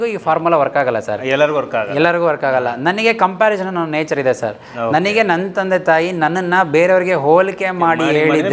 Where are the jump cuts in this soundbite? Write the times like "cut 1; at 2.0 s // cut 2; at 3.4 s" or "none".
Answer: none

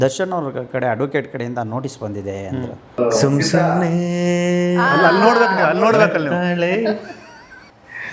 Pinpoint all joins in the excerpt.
cut 1; at 3.0 s

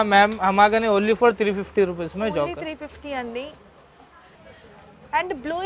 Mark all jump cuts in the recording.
cut 1; at 4.4 s

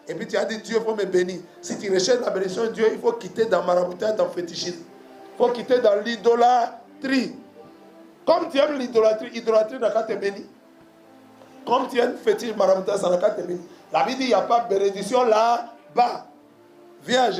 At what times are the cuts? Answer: none

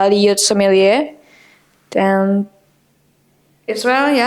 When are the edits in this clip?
none

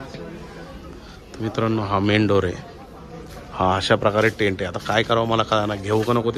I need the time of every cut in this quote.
none

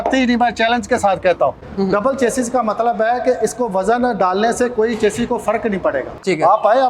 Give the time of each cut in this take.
cut 1; at 1.6 s // cut 2; at 6.0 s

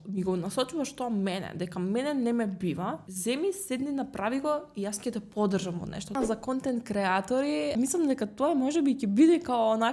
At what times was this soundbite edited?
cut 1; at 3.1 s // cut 2; at 6.1 s // cut 3; at 7.7 s

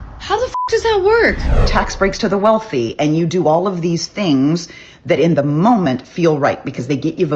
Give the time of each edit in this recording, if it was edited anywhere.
cut 1; at 1.6 s

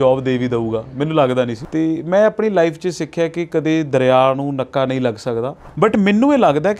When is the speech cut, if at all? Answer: cut 1; at 1.6 s // cut 2; at 5.6 s

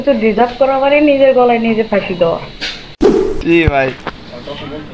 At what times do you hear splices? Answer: cut 1; at 2.9 s

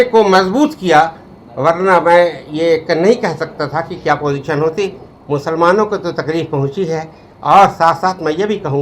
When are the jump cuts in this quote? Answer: cut 1; at 5.1 s

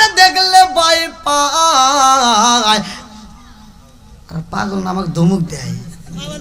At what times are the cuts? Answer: none

